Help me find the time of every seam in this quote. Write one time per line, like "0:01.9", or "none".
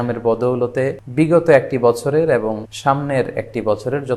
0:01.0
0:02.7